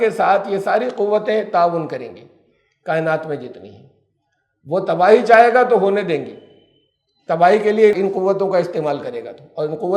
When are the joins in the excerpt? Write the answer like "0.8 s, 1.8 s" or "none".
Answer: 7.9 s